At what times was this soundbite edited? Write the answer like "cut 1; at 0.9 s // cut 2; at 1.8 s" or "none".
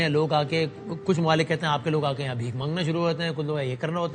none